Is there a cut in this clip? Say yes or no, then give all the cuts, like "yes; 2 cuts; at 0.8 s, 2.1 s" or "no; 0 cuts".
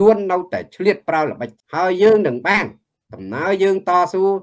yes; 1 cut; at 1.5 s